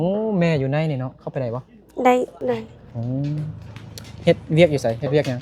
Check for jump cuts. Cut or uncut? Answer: cut